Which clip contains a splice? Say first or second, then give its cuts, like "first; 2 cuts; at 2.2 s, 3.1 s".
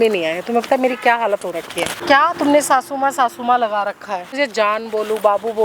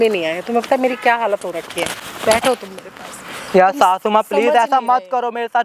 first; 2 cuts; at 2.0 s, 4.3 s